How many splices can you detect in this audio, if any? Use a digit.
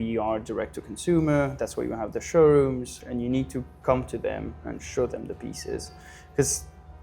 1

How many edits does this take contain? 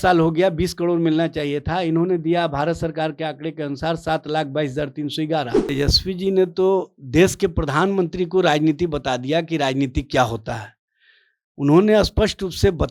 1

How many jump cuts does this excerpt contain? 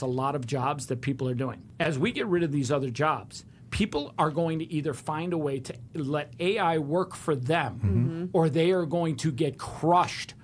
1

